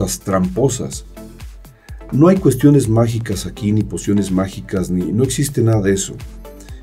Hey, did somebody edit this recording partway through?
no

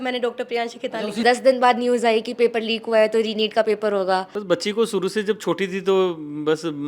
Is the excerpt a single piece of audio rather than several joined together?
no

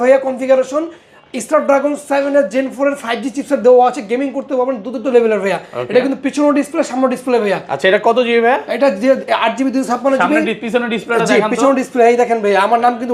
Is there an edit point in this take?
no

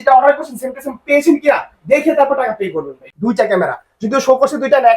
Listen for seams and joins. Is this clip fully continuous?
no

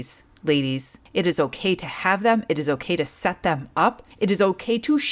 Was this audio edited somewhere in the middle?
yes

